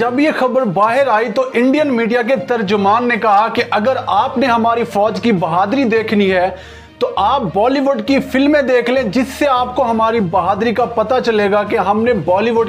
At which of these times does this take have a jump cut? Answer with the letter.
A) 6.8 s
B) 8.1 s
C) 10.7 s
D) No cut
D